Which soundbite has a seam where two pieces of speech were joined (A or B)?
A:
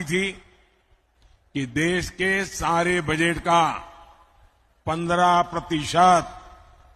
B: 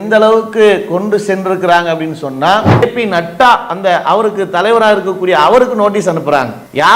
B